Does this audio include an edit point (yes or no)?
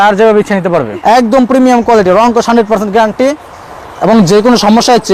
yes